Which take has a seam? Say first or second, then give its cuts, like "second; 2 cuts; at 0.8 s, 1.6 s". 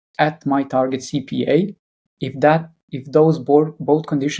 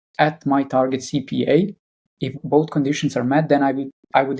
second; 1 cut; at 2.4 s